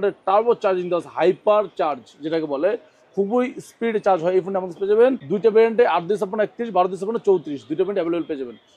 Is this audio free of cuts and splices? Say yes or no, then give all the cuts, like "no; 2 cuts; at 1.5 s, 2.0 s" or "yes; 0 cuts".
yes; 0 cuts